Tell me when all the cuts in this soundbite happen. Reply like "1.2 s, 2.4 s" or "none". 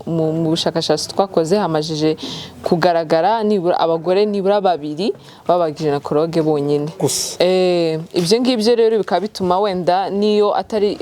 none